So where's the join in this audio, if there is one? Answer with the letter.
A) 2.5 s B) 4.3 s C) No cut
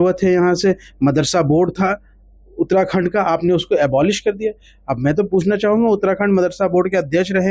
C